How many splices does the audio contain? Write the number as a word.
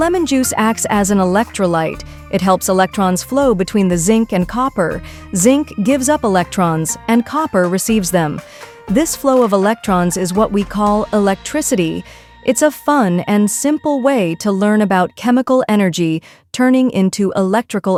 zero